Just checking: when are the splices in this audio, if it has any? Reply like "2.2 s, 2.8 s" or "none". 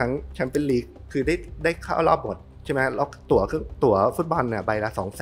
none